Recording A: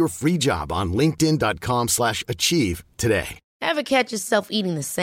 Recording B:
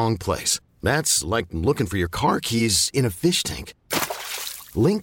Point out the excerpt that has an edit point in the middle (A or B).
A